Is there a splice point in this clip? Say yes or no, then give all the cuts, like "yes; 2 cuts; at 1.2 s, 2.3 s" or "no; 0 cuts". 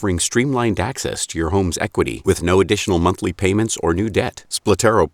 no; 0 cuts